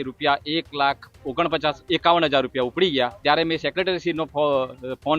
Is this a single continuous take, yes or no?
no